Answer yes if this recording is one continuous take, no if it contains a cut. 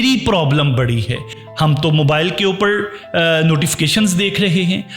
no